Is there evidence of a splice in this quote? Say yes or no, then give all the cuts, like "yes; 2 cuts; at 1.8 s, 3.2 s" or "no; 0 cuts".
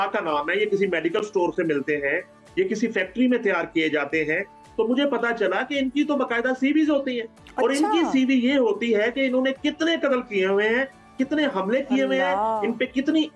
no; 0 cuts